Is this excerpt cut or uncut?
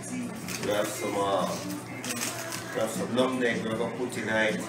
uncut